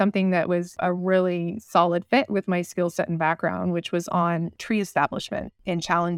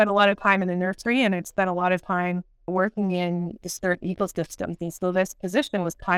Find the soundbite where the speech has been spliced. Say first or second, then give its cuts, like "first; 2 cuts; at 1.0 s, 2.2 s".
first; 1 cut; at 4.6 s